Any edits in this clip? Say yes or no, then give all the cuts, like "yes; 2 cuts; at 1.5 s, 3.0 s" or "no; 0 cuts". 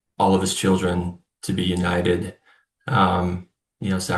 no; 0 cuts